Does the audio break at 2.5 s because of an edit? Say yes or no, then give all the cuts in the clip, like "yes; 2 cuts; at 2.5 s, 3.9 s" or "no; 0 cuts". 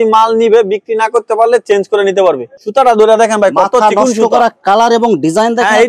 yes; 1 cut; at 2.5 s